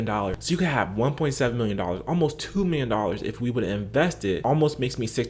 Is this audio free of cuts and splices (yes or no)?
no